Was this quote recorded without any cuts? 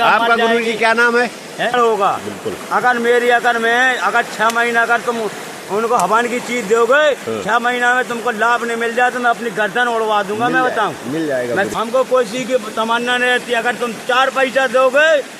no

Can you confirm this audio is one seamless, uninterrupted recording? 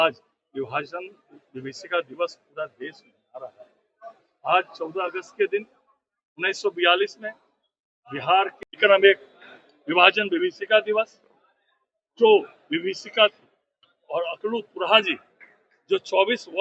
yes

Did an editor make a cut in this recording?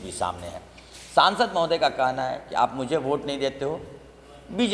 no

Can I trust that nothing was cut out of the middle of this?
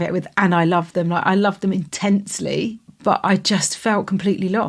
no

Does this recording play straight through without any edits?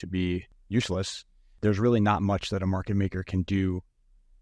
no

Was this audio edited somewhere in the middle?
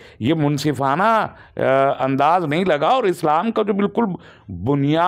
no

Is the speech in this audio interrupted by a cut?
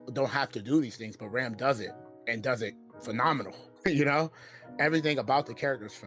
yes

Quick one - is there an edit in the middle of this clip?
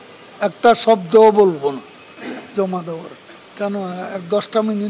yes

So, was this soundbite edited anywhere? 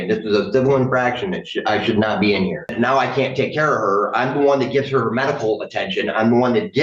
yes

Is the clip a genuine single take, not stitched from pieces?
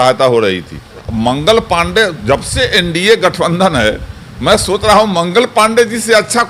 no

